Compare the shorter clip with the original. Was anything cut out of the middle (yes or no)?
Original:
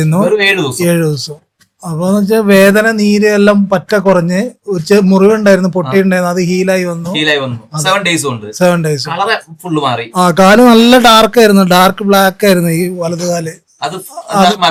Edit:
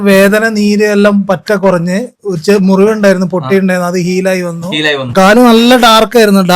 yes